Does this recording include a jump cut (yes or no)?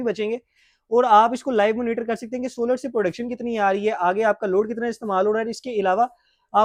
no